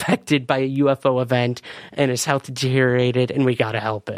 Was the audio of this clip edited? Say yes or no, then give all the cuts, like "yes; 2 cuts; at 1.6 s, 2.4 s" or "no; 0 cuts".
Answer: no; 0 cuts